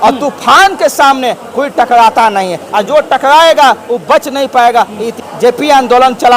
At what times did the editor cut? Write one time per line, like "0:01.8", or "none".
0:05.1